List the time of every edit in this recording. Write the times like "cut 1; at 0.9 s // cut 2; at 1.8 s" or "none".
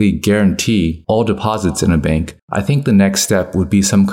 cut 1; at 2.4 s